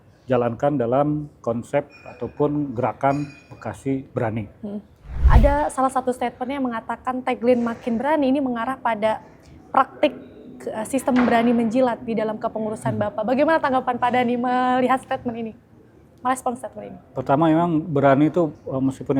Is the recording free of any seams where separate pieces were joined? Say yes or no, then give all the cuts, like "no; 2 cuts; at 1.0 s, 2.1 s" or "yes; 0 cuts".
no; 1 cut; at 5.2 s